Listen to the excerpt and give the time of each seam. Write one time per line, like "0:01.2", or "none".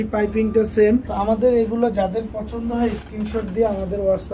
0:01.1